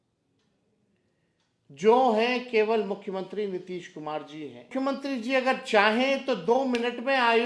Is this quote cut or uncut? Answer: cut